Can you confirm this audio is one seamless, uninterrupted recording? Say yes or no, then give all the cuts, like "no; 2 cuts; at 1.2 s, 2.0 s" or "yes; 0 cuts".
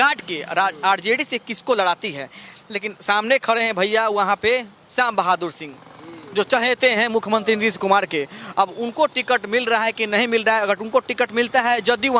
yes; 0 cuts